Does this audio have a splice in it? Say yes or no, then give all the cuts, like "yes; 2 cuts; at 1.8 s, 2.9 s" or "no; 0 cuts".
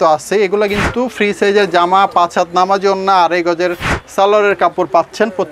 no; 0 cuts